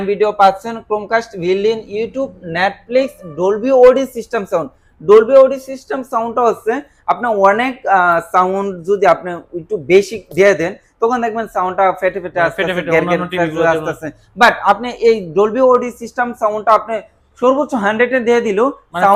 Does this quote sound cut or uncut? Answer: uncut